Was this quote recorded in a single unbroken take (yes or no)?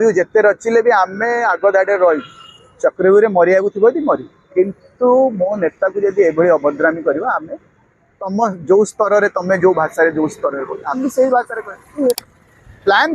no